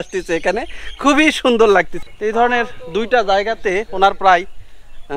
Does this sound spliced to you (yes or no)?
yes